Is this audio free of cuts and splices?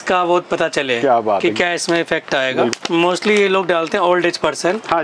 no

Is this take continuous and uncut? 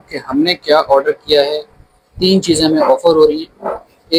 yes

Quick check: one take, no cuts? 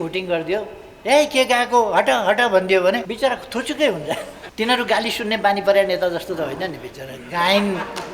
no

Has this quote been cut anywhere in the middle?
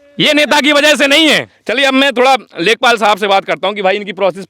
yes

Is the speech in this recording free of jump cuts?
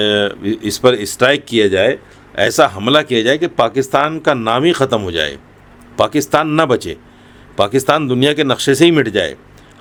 yes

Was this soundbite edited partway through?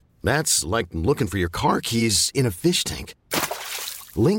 no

